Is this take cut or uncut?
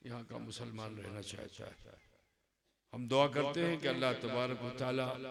uncut